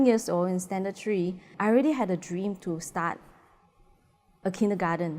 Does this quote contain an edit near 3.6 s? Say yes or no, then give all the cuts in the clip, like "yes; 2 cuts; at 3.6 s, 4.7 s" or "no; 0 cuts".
no; 1 cut; at 1.5 s